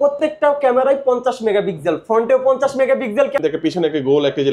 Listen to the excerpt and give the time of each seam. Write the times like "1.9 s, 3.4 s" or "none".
3.4 s

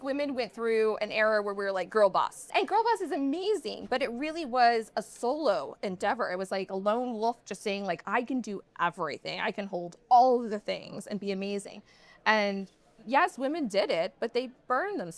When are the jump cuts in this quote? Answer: 2.5 s

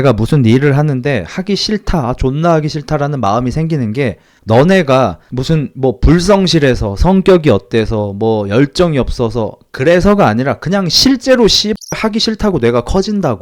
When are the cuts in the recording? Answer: 4.3 s, 5.3 s

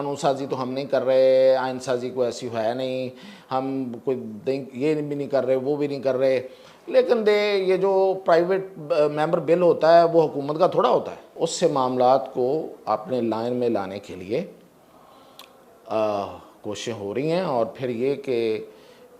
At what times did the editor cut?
11.3 s

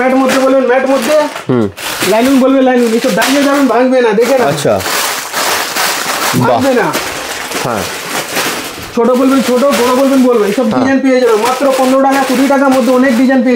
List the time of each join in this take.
none

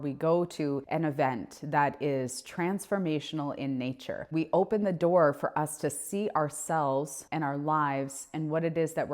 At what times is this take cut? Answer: 0.8 s, 4.3 s, 7.2 s

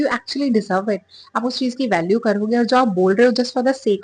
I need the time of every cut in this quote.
none

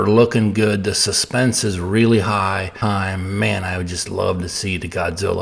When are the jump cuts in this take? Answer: 2.7 s

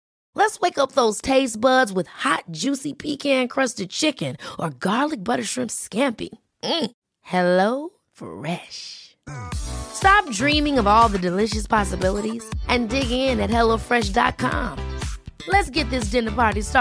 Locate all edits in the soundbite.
none

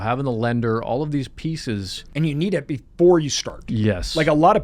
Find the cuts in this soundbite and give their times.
2.0 s

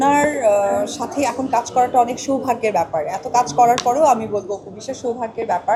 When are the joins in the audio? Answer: none

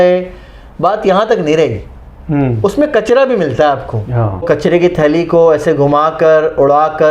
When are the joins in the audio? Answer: 4.4 s

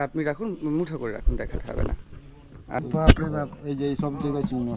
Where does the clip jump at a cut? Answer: 2.8 s

